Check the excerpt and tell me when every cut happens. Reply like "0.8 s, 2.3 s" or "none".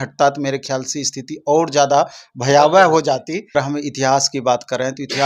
3.6 s